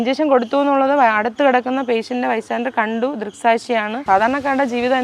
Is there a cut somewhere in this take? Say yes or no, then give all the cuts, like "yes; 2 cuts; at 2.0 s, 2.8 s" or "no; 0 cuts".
yes; 1 cut; at 3.9 s